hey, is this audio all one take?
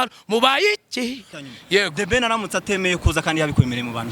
no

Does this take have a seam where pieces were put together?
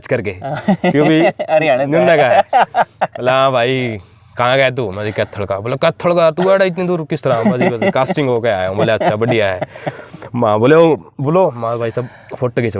no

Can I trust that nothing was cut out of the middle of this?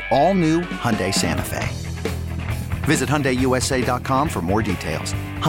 yes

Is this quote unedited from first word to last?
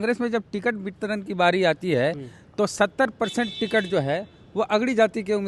yes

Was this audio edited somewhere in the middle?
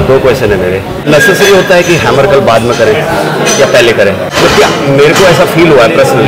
no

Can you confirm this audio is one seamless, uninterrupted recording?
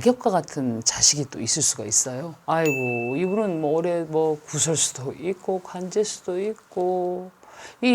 no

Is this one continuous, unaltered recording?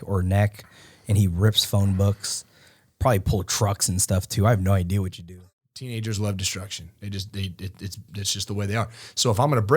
no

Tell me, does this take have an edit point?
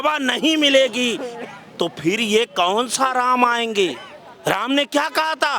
no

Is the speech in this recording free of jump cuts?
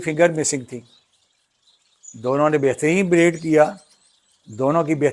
yes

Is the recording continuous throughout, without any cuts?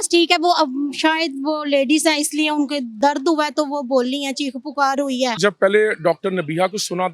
no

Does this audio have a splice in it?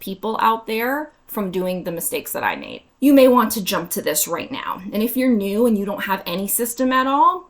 yes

